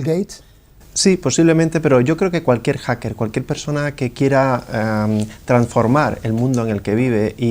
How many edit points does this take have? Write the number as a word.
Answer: one